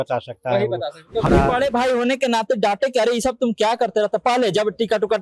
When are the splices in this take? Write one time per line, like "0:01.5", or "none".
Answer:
0:01.3